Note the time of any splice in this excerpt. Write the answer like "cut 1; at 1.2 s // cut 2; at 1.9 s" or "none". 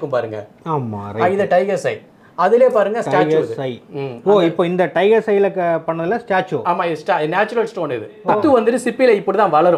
cut 1; at 8.4 s